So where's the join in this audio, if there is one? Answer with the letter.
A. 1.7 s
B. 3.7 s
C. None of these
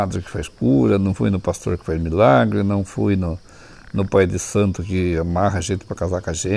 C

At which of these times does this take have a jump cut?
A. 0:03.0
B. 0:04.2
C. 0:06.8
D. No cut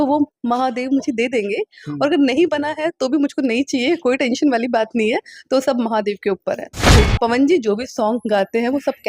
C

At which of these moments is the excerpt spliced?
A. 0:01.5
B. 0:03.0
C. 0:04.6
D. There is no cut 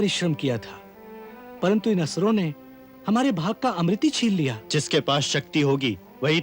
C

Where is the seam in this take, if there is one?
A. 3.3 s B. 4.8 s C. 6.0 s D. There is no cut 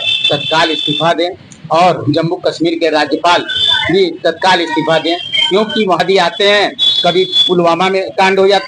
C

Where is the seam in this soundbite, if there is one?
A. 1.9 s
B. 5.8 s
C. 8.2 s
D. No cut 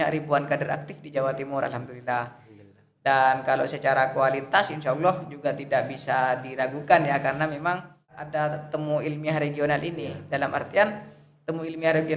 C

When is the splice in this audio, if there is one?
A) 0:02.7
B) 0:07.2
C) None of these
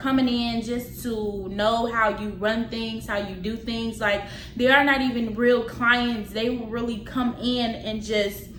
C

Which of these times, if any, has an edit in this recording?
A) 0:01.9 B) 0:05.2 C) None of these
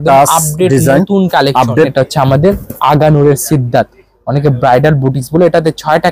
A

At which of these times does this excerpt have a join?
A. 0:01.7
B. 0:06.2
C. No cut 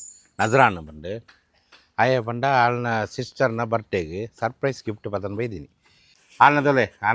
B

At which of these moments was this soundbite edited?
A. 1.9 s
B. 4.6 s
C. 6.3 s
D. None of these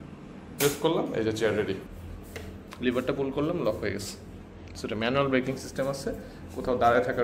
A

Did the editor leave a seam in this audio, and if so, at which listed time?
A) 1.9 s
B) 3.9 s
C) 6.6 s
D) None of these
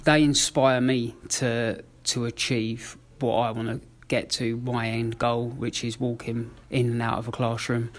C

